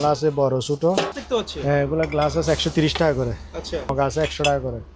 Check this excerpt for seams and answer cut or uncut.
cut